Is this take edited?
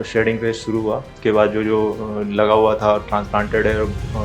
no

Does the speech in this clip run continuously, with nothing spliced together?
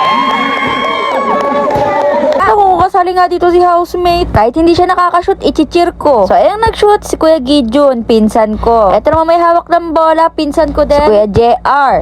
no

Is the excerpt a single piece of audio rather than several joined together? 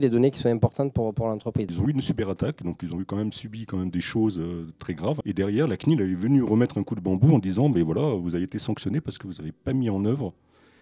no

